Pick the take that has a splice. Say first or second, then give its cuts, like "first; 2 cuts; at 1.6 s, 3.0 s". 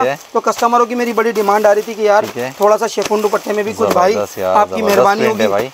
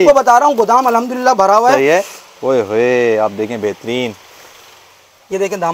second; 1 cut; at 2.1 s